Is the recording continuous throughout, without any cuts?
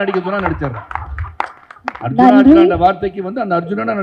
yes; 0 cuts

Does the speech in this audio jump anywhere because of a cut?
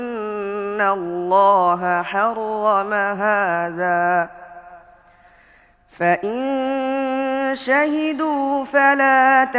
no; 0 cuts

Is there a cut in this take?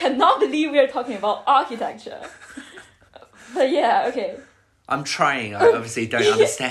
no; 0 cuts

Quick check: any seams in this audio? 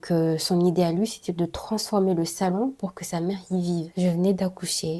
yes; 1 cut; at 3.9 s

